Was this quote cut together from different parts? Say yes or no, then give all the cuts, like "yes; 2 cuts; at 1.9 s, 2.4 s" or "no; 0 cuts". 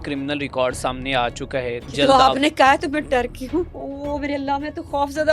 yes; 2 cuts; at 1.9 s, 3.8 s